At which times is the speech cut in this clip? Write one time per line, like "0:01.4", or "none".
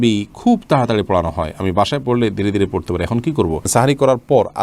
0:03.7